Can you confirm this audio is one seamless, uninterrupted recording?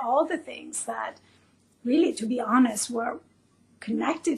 yes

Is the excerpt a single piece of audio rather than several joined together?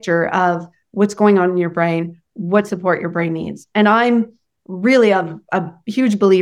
yes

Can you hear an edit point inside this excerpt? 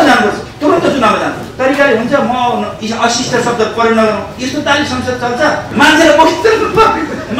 yes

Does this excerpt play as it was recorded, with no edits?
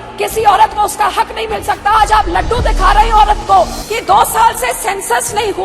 no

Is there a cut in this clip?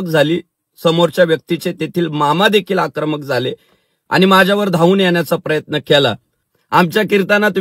yes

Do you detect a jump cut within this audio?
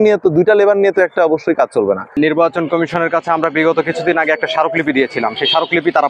yes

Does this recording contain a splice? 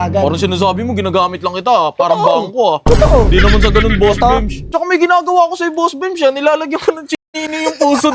yes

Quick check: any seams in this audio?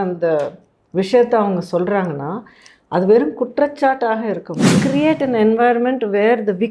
yes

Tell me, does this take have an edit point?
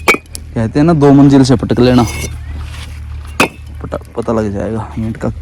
no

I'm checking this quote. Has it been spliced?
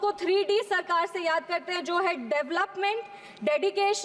no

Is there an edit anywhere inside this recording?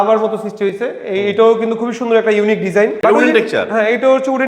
yes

